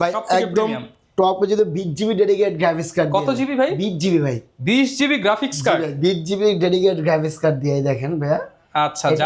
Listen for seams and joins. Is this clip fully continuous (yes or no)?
yes